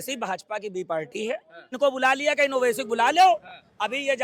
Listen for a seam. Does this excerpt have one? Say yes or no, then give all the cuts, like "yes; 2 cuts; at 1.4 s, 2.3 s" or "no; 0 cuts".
yes; 1 cut; at 1.8 s